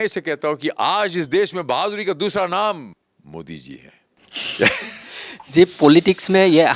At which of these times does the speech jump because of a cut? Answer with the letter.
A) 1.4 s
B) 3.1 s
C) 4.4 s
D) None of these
D